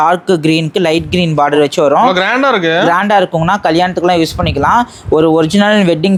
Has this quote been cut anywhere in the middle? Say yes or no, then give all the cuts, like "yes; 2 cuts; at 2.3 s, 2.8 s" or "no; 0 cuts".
no; 0 cuts